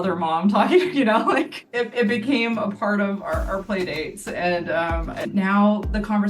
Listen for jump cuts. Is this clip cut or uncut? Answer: cut